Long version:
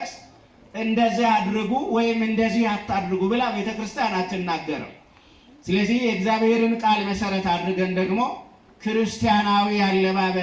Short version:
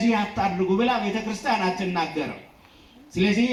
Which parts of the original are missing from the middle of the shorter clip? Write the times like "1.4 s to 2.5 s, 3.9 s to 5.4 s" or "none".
none